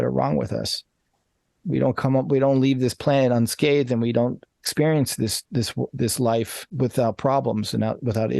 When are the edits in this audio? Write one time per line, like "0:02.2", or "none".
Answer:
0:06.7